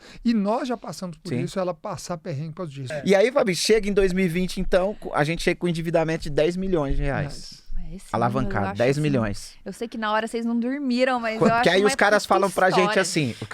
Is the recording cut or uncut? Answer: cut